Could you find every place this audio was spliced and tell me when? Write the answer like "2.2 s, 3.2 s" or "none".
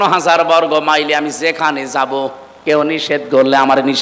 2.5 s